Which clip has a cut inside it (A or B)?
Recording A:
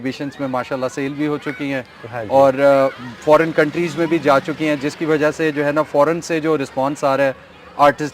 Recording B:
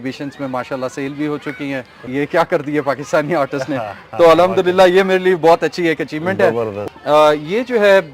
B